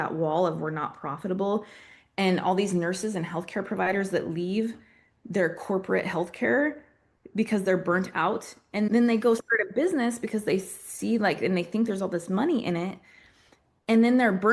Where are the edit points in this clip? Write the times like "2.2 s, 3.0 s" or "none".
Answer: 8.9 s